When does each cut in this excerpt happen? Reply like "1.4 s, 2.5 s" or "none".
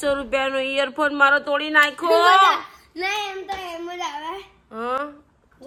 none